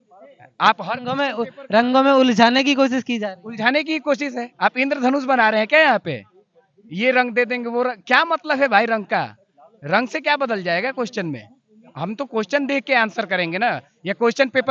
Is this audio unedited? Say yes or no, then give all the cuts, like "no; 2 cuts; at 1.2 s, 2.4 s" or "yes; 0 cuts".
yes; 0 cuts